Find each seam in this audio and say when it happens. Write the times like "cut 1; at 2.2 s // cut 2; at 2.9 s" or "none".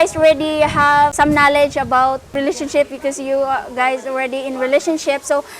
cut 1; at 1.1 s // cut 2; at 2.4 s